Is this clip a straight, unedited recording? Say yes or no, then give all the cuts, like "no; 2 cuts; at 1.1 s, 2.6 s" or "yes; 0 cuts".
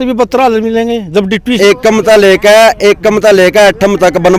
no; 1 cut; at 1.6 s